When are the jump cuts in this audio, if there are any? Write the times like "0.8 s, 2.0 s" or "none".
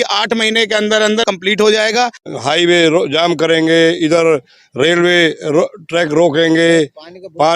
1.2 s, 2.2 s